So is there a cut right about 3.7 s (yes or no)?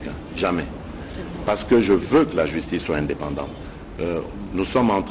yes